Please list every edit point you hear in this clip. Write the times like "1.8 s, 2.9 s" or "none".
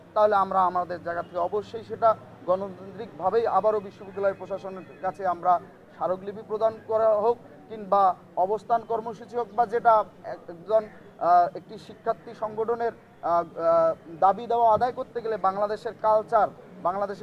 none